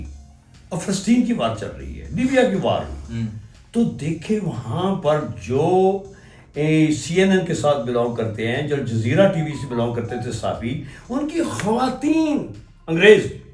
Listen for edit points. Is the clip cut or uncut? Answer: uncut